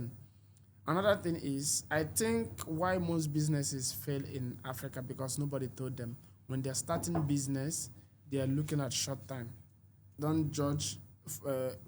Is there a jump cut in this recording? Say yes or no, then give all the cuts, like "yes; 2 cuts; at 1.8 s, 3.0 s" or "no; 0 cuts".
yes; 1 cut; at 10.1 s